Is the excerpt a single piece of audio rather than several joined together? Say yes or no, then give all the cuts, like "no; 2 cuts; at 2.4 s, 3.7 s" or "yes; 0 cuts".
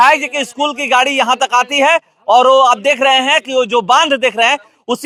yes; 0 cuts